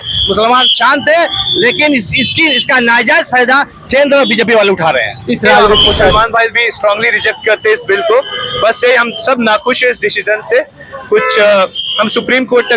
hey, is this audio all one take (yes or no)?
no